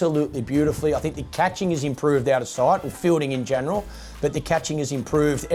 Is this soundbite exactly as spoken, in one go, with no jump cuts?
yes; 0 cuts

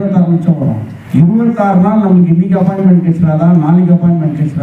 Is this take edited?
yes; 1 cut; at 0.9 s

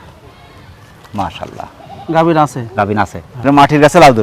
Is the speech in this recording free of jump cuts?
no; 1 cut; at 3.2 s

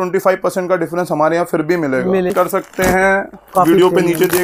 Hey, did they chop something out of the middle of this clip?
yes; 1 cut; at 2.3 s

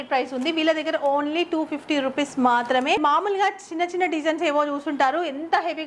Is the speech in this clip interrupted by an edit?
yes; 1 cut; at 3.0 s

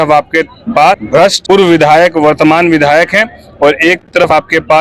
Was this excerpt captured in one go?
yes; 0 cuts

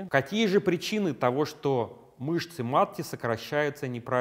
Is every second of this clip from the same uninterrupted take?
yes; 0 cuts

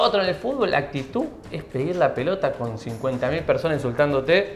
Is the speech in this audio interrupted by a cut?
no; 0 cuts

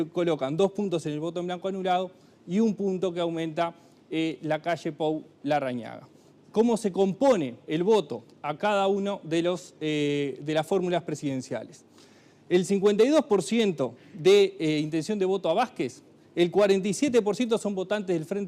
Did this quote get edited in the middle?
no; 0 cuts

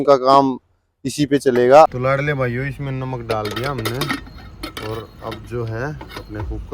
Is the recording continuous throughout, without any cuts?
no; 1 cut; at 1.9 s

